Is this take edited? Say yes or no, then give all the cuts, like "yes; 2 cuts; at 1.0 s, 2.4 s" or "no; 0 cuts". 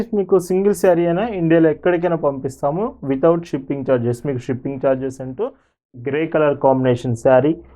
yes; 1 cut; at 5.9 s